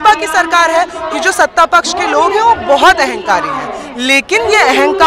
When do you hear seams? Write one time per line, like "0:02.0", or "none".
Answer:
0:01.0